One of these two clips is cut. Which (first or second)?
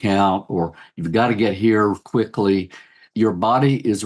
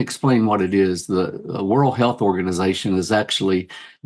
first